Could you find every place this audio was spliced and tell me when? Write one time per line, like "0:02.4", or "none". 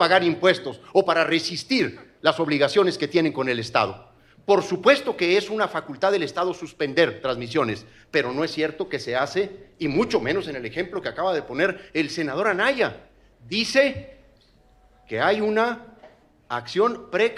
none